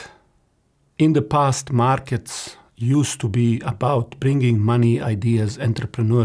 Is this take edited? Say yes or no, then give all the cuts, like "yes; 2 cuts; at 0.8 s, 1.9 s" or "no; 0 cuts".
no; 0 cuts